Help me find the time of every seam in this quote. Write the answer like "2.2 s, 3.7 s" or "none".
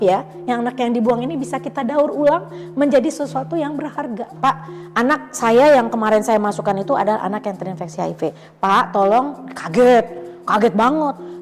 4.3 s